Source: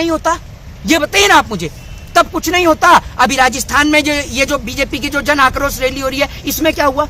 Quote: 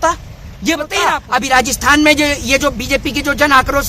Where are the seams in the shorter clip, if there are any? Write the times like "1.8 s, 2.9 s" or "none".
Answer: 1.2 s